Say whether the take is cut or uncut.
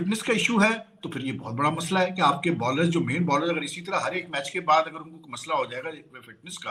uncut